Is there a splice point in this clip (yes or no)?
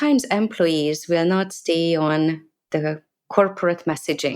no